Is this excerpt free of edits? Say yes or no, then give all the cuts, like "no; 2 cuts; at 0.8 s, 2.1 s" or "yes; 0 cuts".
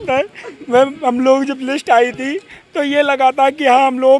yes; 0 cuts